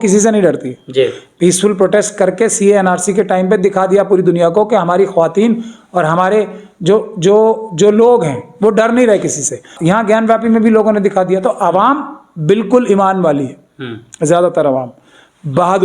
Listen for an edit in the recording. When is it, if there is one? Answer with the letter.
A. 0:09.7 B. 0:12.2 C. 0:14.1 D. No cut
A